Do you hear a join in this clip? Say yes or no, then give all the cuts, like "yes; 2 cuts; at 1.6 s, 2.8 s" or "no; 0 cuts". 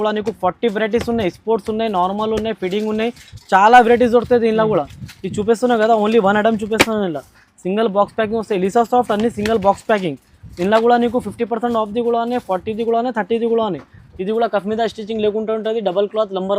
no; 0 cuts